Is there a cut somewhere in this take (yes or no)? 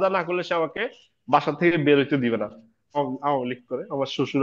yes